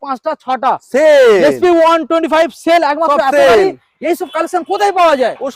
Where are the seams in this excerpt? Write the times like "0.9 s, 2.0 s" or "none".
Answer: none